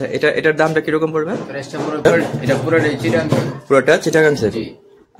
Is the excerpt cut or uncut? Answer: cut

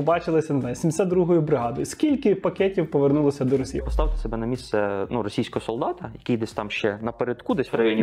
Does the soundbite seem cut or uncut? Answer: cut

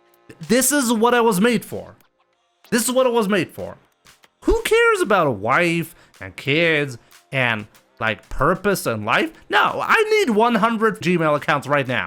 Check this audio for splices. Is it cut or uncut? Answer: cut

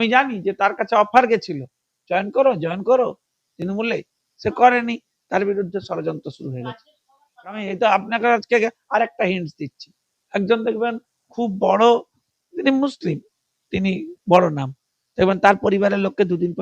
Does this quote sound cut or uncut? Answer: cut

